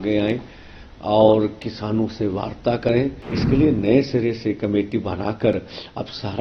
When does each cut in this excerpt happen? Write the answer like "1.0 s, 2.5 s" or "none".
3.3 s